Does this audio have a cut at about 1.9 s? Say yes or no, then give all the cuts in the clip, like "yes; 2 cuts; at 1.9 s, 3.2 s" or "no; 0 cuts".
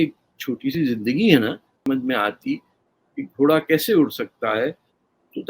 yes; 1 cut; at 1.9 s